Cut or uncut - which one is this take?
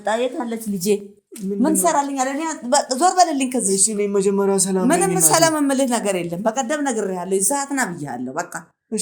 uncut